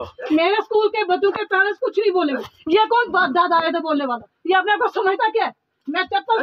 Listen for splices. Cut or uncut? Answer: uncut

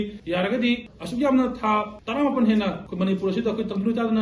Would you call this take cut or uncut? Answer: cut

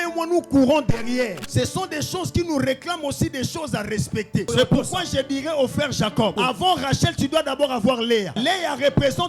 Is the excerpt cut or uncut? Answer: cut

